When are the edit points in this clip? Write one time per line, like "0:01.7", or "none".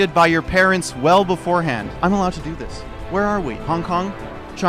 0:01.9